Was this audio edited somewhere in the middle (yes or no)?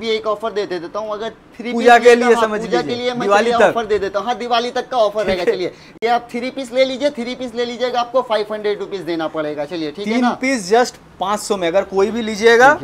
no